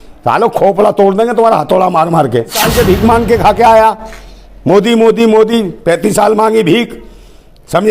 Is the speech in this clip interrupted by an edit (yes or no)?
yes